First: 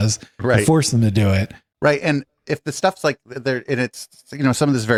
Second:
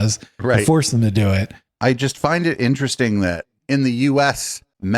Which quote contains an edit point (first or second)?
second